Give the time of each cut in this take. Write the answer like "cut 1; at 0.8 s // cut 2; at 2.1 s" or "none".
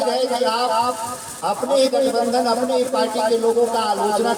none